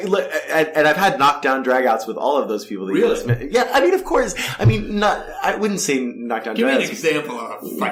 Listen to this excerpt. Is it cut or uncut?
uncut